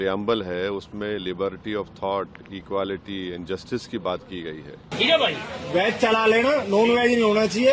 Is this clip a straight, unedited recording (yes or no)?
no